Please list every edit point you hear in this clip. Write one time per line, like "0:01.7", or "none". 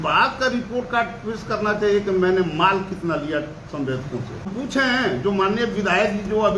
0:04.5